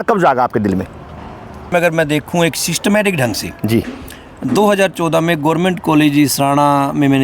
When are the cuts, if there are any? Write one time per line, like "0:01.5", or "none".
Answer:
0:01.7